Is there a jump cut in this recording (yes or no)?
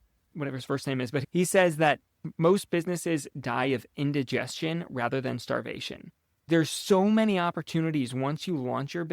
yes